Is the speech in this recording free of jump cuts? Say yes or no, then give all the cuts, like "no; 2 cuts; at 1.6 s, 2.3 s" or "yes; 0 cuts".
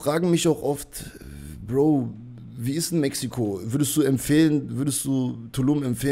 yes; 0 cuts